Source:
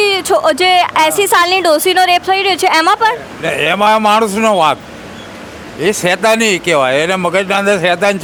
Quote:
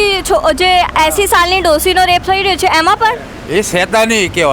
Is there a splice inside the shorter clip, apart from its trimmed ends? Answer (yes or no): yes